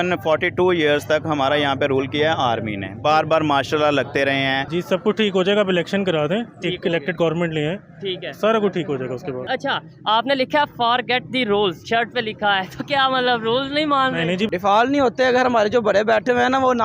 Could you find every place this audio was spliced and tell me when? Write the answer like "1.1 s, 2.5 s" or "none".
4.7 s, 9.4 s, 14.5 s